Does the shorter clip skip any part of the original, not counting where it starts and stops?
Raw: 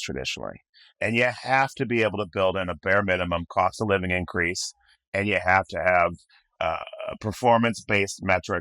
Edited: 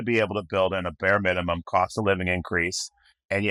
no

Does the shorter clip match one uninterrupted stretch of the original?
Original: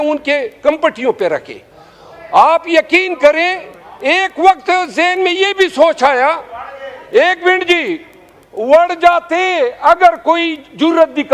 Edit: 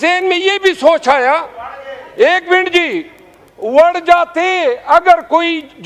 yes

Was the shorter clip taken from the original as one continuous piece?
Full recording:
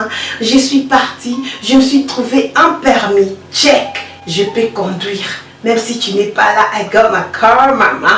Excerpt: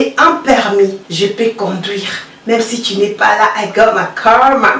no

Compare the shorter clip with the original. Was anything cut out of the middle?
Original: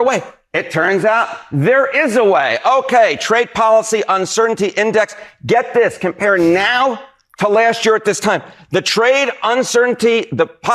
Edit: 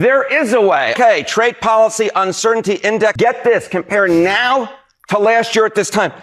yes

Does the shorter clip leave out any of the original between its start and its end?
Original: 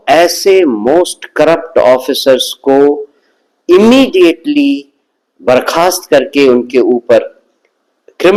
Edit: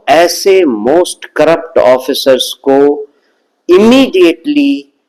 no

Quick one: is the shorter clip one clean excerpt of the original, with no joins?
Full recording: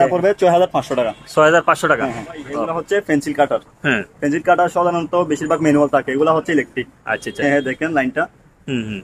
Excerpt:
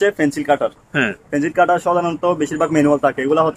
yes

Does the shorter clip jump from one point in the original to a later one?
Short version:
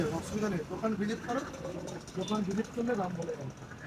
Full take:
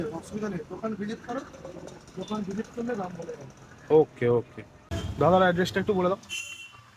no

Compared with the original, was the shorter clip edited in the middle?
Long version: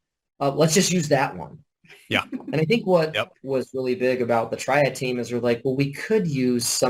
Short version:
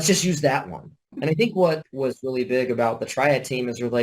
yes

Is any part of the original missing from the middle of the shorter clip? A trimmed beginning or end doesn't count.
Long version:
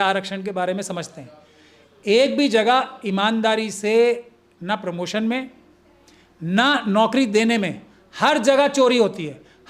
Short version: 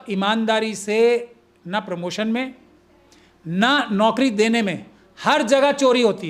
no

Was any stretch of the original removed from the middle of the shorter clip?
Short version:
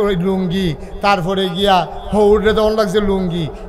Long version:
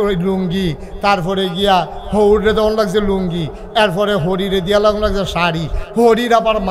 no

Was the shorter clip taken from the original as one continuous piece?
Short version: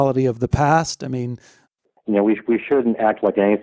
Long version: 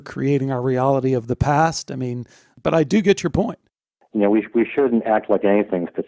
no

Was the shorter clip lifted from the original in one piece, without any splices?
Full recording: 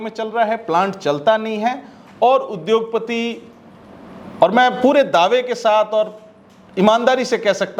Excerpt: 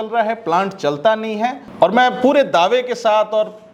no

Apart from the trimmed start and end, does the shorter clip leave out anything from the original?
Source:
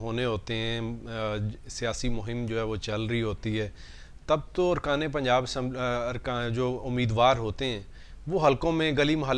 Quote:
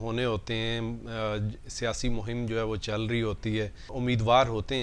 yes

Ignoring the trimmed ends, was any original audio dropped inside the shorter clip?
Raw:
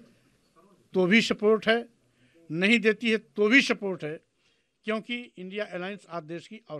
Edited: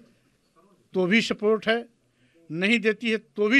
no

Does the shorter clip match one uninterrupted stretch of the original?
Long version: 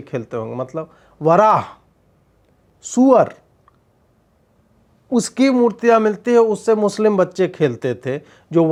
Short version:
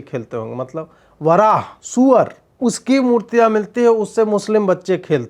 no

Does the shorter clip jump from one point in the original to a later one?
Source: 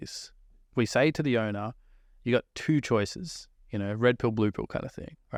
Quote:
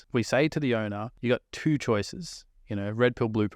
yes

